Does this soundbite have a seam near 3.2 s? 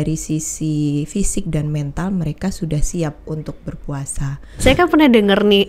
no; 1 cut; at 4.5 s

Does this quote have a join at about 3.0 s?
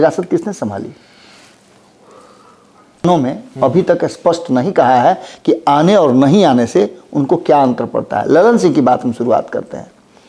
yes; 1 cut; at 3.0 s

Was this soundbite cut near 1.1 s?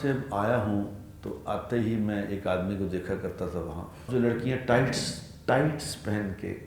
no; 1 cut; at 4.1 s

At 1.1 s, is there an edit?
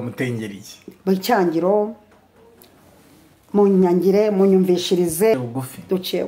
no; 1 cut; at 5.3 s

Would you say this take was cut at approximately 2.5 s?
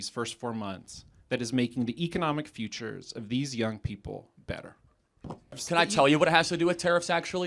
no; 1 cut; at 5.6 s

